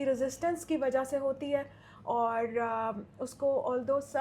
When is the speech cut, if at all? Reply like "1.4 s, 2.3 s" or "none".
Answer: none